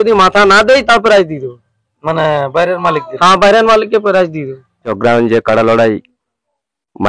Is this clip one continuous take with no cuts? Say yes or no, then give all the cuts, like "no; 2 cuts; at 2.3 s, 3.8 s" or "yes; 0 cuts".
no; 1 cut; at 4.9 s